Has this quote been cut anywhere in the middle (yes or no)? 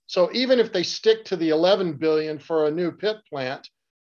no